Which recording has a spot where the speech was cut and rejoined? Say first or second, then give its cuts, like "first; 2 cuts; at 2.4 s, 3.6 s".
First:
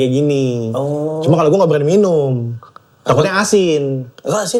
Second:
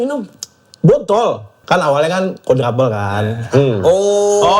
second; 1 cut; at 1.5 s